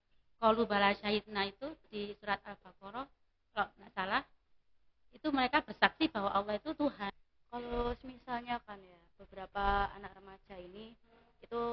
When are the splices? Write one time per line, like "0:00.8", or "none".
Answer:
0:07.3